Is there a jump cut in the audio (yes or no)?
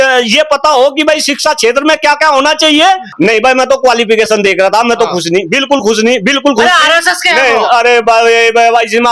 yes